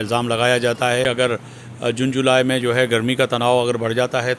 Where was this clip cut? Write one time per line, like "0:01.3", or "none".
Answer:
0:01.1